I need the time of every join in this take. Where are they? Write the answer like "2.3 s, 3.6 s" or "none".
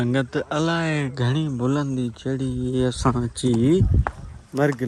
none